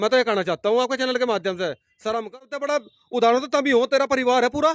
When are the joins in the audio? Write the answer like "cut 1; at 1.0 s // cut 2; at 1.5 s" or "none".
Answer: cut 1; at 2.4 s

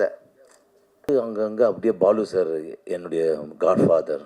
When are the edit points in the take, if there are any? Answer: cut 1; at 1.1 s

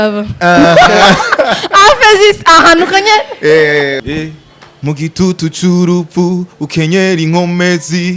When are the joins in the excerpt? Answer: cut 1; at 4.0 s

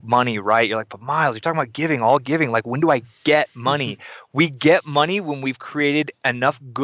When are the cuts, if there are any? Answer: none

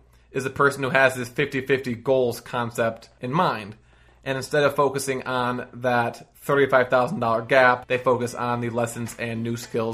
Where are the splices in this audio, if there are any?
cut 1; at 3.1 s // cut 2; at 7.8 s

